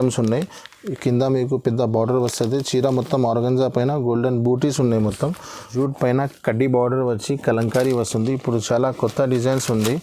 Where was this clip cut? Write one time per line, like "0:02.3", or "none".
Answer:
0:05.7